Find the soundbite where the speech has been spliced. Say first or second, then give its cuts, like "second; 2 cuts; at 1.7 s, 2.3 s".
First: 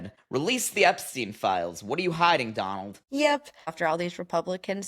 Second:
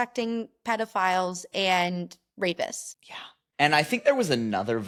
first; 1 cut; at 3.8 s